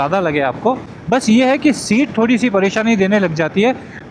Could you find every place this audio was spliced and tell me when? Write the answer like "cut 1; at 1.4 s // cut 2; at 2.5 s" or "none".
cut 1; at 0.9 s

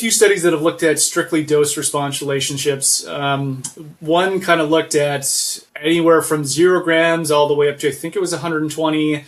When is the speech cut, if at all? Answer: none

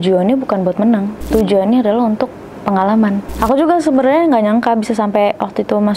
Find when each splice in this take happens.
cut 1; at 1.3 s // cut 2; at 3.3 s

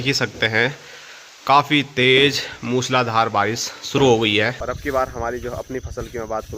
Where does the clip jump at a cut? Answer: cut 1; at 4.6 s

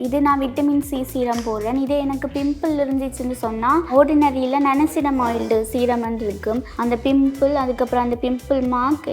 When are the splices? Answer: cut 1; at 3.9 s // cut 2; at 6.7 s

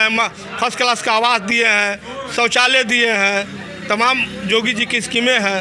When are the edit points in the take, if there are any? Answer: none

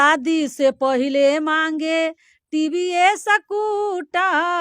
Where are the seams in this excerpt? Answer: none

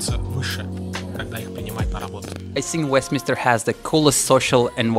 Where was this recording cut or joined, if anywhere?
cut 1; at 2.6 s

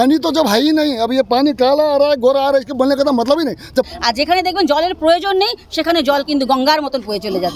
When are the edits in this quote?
cut 1; at 3.9 s

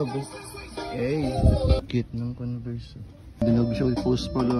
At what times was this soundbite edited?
cut 1; at 3.4 s

